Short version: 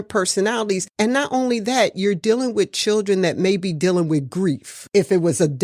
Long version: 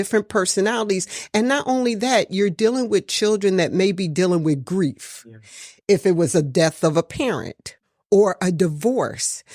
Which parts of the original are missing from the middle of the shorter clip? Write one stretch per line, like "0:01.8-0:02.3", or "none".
0:01.1-0:01.2
0:05.1-0:05.7